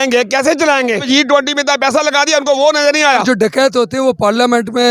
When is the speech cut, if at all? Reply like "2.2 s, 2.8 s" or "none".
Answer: 1.0 s, 3.2 s

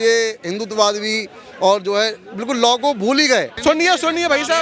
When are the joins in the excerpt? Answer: 3.5 s

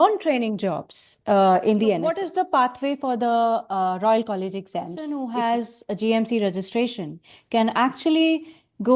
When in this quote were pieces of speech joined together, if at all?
2.2 s, 5.1 s

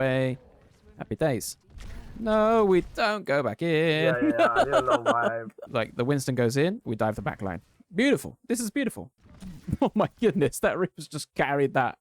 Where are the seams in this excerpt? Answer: 5.6 s, 9.1 s

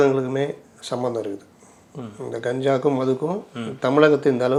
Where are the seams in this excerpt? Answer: none

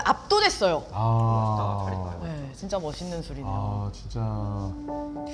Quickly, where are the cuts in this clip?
none

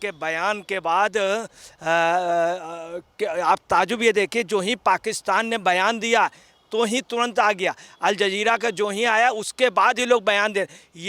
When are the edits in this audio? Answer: none

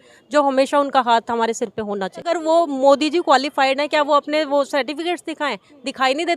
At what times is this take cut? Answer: 2.2 s

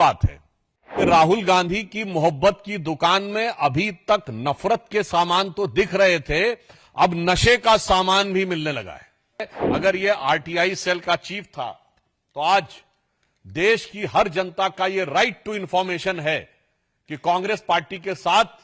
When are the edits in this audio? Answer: 1.0 s, 9.6 s

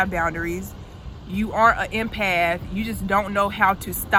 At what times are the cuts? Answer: none

